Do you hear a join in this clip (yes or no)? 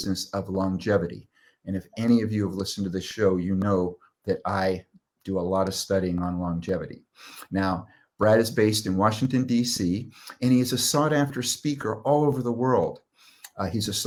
no